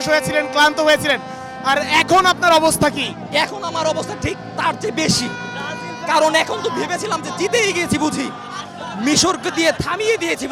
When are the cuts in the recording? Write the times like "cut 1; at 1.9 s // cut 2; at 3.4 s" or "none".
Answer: none

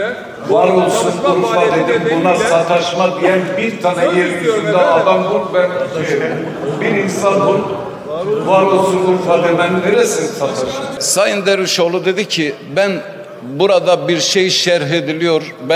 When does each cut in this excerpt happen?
cut 1; at 11.0 s

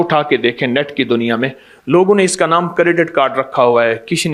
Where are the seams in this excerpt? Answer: none

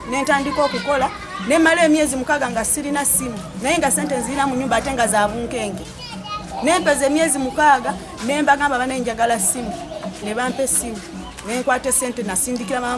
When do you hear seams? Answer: none

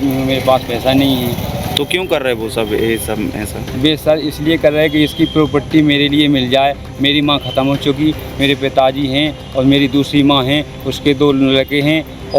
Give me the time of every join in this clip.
none

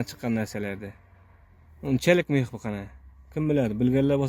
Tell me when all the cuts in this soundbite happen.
none

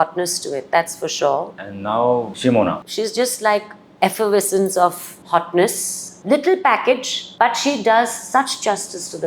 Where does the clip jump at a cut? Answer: cut 1; at 1.5 s // cut 2; at 2.8 s

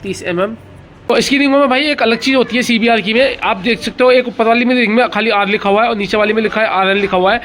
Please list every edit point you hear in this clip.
cut 1; at 1.3 s

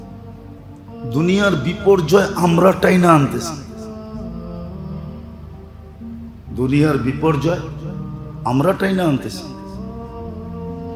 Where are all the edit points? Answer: cut 1; at 3.7 s // cut 2; at 6.4 s // cut 3; at 9.4 s

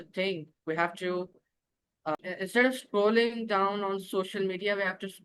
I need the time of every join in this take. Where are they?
cut 1; at 2.1 s

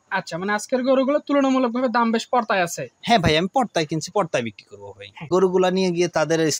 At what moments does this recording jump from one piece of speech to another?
cut 1; at 5.3 s

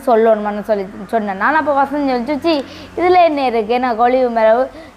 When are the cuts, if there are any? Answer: none

